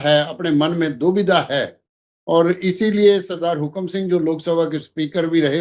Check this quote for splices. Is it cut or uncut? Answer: uncut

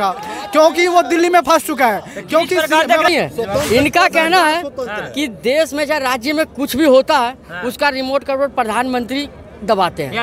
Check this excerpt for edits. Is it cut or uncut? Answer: cut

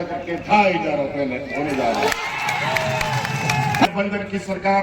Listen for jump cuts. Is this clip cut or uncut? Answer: cut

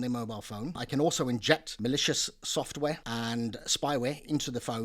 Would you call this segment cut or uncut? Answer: cut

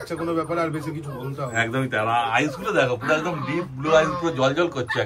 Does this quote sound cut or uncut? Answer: uncut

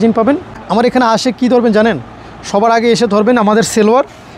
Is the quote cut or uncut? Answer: uncut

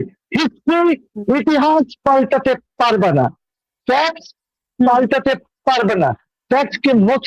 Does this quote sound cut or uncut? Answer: uncut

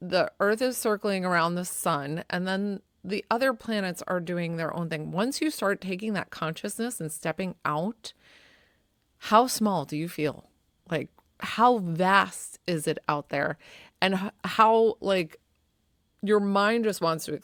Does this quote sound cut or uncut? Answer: uncut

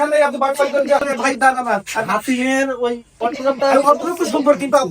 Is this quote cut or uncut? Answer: cut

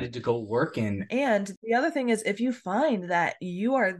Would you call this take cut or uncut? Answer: cut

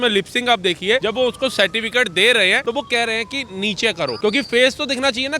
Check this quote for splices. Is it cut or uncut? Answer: cut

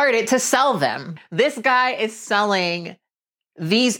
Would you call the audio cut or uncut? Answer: cut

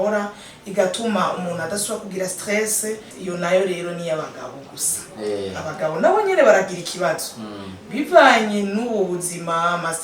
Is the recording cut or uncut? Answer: cut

